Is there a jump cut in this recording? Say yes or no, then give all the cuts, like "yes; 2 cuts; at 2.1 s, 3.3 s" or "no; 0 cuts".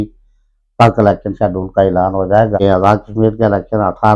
no; 0 cuts